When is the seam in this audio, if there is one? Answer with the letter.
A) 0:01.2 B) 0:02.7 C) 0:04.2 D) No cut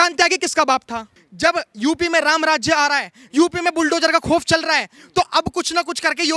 A